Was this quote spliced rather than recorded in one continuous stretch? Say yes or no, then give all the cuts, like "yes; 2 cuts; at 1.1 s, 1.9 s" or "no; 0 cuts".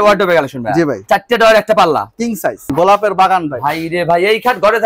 yes; 2 cuts; at 1.0 s, 2.7 s